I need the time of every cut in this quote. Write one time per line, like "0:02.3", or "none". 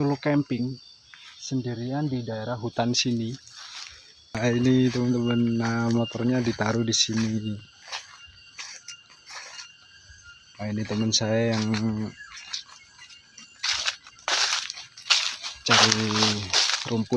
0:04.4